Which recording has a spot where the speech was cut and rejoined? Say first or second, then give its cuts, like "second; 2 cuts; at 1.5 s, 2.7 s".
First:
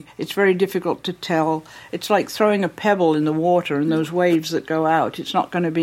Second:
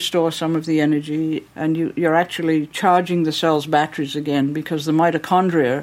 second; 1 cut; at 1.5 s